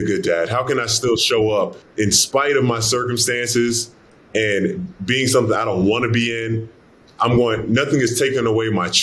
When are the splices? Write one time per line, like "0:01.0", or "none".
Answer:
0:01.8